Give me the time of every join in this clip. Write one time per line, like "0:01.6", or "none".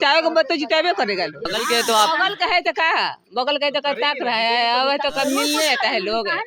0:01.5